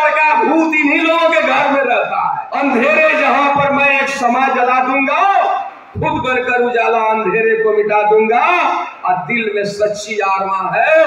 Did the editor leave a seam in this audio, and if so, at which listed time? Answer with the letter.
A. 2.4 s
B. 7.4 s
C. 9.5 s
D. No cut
A